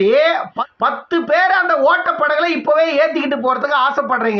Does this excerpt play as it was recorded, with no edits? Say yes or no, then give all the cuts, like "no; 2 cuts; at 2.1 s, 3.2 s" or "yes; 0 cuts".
yes; 0 cuts